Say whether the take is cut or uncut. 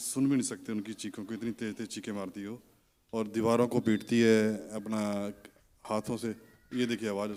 uncut